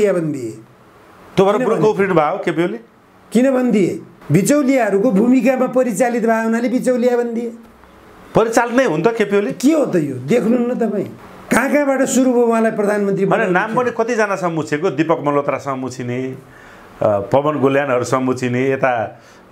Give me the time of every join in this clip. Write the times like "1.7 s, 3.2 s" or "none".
none